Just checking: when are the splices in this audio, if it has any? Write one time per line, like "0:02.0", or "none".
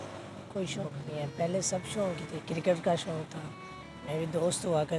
none